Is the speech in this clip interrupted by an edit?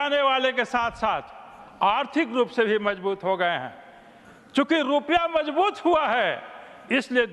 no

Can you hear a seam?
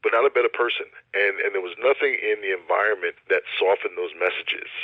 yes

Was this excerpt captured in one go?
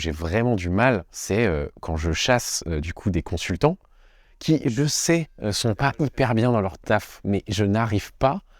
no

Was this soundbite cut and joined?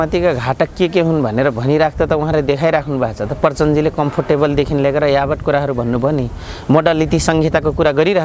no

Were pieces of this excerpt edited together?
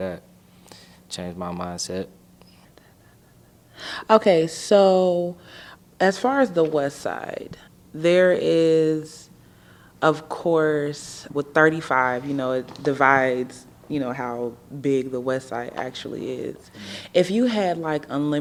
no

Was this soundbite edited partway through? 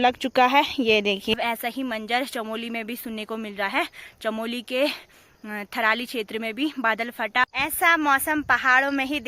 yes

